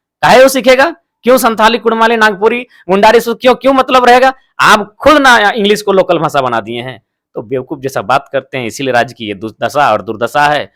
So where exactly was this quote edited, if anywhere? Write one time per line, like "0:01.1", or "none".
none